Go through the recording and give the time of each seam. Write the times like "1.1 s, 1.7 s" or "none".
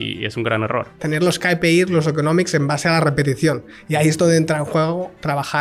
0.9 s